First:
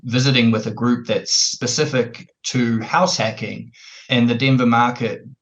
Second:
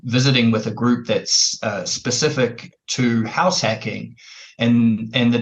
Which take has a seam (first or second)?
first